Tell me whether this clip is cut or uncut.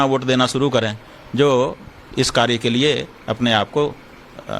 cut